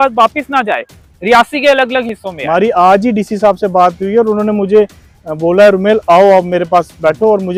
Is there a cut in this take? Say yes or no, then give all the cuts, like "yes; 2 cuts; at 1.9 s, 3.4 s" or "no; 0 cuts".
no; 0 cuts